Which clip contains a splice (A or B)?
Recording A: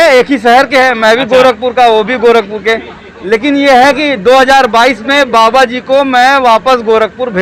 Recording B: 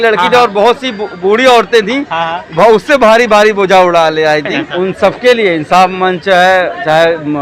B